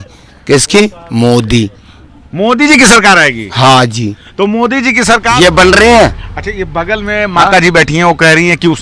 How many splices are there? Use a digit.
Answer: 1